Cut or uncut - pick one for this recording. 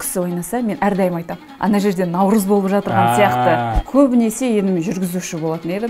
cut